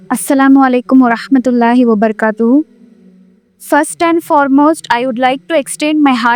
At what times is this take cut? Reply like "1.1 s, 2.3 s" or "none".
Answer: none